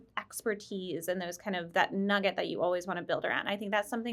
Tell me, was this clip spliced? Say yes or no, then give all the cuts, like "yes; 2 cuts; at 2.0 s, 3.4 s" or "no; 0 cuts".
no; 0 cuts